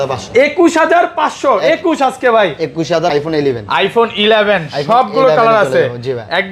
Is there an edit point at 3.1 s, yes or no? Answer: yes